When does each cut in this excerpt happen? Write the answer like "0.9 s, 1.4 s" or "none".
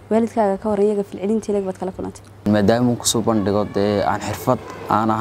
2.4 s

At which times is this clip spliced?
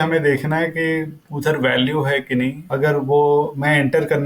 1.2 s, 2.6 s

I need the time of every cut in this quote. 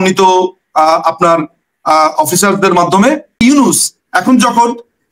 3.4 s

